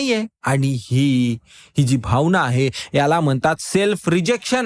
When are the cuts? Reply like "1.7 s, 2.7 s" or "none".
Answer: none